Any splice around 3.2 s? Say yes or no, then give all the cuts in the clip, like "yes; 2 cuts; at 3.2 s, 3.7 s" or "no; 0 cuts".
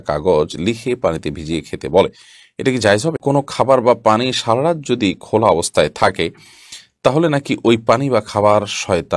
yes; 1 cut; at 3.2 s